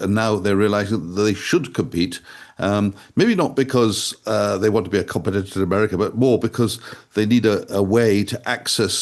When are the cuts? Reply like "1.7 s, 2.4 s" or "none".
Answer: none